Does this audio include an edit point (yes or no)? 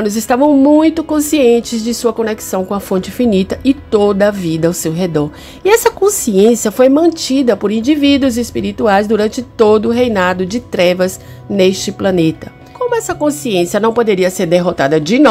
no